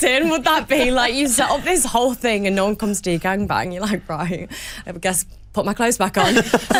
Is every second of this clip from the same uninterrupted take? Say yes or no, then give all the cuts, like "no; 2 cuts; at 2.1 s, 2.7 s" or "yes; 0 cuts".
yes; 0 cuts